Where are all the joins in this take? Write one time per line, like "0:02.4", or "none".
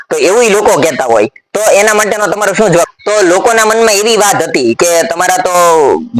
0:02.9